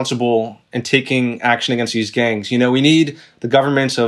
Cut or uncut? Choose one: uncut